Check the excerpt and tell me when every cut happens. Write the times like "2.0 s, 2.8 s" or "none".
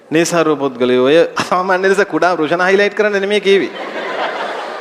1.4 s